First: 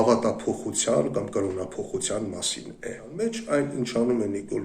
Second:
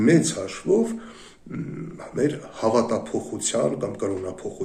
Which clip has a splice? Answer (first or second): first